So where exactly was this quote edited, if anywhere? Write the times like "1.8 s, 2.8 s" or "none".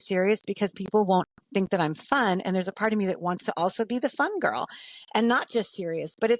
none